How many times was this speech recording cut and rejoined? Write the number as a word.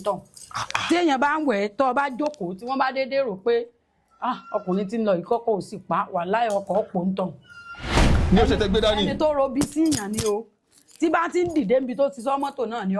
zero